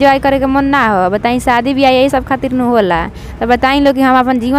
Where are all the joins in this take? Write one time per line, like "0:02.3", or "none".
none